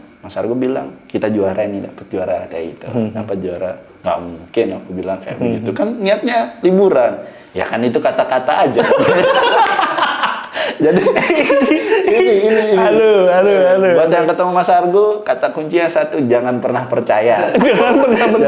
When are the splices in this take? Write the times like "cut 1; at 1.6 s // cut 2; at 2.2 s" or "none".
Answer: none